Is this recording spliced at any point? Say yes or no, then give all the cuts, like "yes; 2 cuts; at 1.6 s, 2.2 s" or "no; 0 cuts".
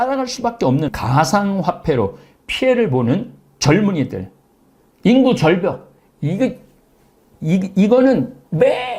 yes; 1 cut; at 0.9 s